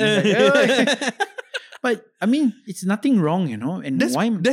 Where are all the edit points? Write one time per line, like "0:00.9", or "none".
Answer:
0:02.7